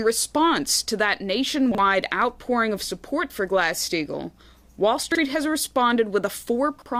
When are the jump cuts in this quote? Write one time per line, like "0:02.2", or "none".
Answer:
0:00.9